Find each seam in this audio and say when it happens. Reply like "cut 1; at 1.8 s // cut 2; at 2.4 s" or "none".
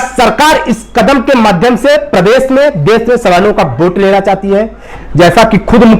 cut 1; at 4.9 s